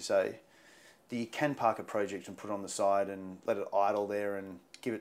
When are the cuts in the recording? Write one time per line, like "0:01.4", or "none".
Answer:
none